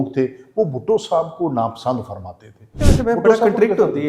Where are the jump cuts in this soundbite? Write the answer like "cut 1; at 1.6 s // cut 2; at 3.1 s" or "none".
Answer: cut 1; at 2.7 s